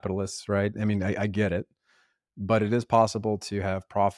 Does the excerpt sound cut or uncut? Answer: uncut